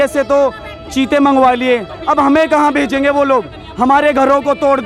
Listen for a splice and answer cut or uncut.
uncut